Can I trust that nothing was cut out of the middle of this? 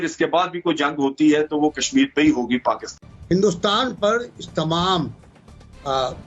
no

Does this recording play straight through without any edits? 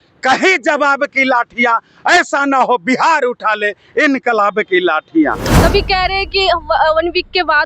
no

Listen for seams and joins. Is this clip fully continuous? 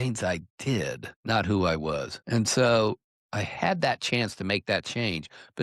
no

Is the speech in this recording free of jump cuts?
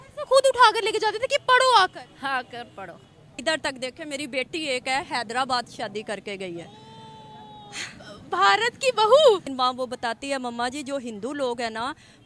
no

